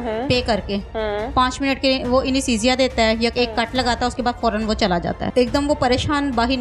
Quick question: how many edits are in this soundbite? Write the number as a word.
one